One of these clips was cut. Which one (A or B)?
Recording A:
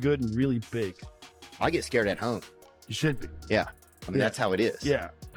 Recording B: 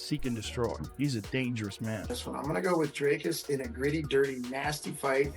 B